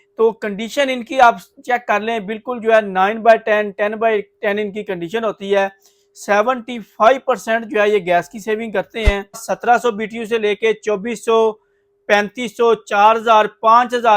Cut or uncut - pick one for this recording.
cut